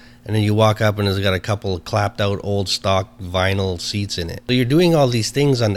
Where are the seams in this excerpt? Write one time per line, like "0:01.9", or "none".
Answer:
0:04.3